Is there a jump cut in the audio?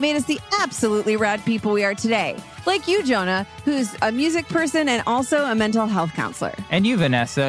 no; 0 cuts

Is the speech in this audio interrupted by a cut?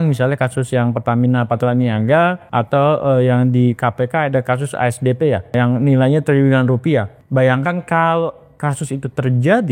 yes; 3 cuts; at 2.4 s, 5.5 s, 7.2 s

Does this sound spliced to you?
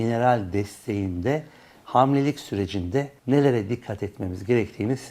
yes; 1 cut; at 3.1 s

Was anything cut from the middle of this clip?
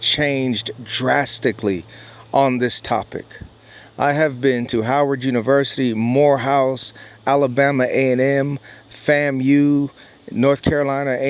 no; 0 cuts

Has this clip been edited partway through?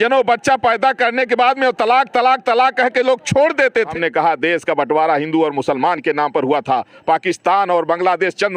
yes; 1 cut; at 3.9 s

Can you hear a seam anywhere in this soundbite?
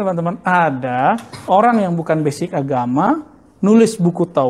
no; 0 cuts

